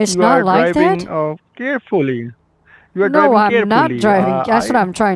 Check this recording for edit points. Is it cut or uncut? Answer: uncut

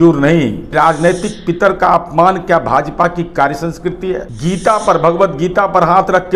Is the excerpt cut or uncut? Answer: cut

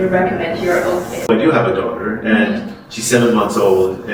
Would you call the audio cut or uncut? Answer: uncut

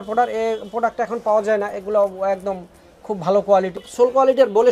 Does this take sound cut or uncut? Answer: cut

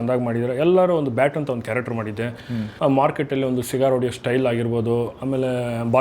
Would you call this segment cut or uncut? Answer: cut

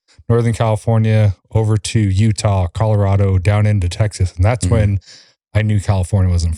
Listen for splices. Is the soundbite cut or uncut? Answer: uncut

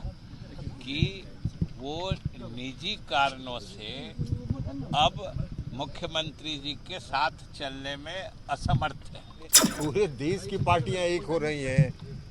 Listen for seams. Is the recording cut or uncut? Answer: cut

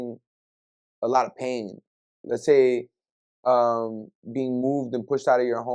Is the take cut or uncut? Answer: uncut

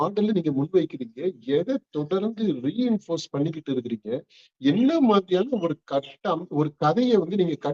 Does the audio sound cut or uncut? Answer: uncut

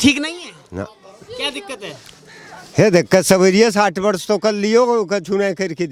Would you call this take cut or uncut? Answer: uncut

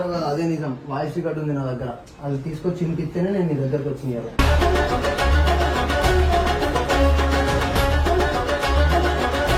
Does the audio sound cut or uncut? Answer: uncut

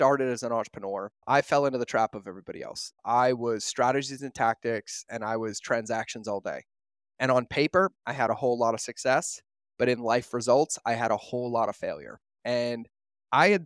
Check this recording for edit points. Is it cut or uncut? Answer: cut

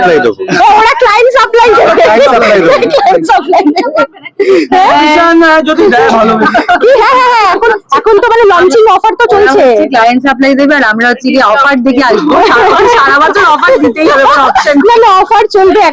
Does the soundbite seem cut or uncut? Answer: uncut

